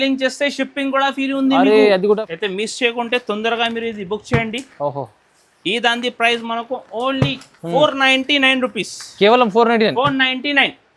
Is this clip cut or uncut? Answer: cut